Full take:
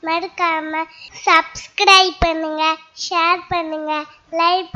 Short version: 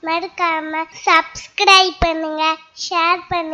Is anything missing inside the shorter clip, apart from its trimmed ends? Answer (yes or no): yes